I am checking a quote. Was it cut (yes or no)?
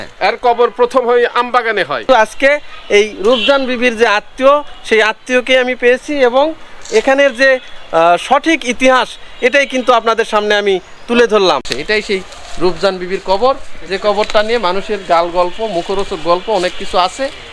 yes